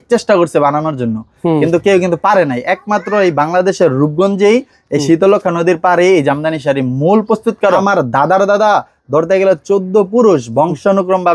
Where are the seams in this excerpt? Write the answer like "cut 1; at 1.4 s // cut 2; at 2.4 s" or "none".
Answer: cut 1; at 7.8 s